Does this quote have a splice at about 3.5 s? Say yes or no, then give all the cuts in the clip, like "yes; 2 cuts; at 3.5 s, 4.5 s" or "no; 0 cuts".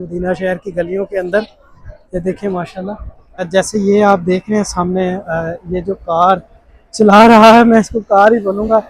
yes; 1 cut; at 3.5 s